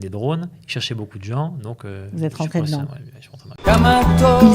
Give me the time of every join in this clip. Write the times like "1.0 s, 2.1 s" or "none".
3.5 s